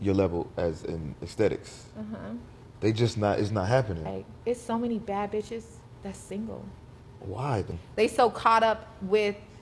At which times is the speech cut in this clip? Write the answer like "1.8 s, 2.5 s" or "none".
4.2 s, 7.8 s